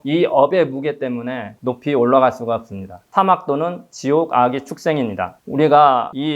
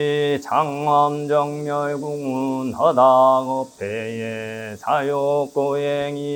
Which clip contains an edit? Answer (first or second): first